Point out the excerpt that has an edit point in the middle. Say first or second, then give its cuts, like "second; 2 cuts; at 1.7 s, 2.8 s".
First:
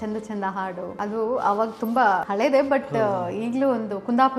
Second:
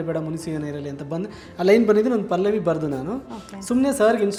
first; 2 cuts; at 0.9 s, 2.3 s